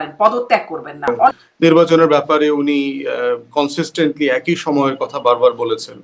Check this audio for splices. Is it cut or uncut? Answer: cut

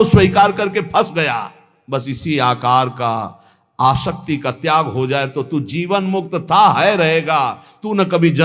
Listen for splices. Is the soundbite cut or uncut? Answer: uncut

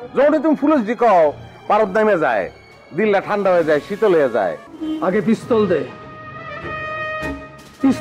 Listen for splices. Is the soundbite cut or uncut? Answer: cut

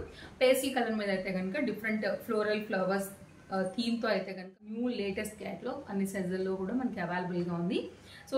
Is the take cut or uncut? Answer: cut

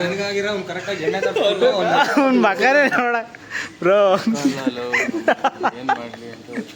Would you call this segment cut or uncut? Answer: uncut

